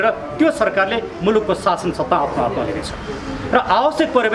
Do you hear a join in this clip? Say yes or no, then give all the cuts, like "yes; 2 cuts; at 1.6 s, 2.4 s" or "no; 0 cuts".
no; 0 cuts